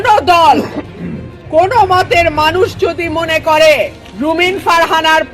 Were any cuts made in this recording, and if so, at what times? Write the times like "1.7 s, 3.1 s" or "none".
4.0 s